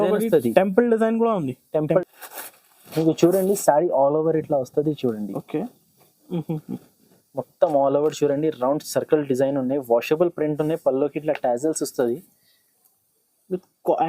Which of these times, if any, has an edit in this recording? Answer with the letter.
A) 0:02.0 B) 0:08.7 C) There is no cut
A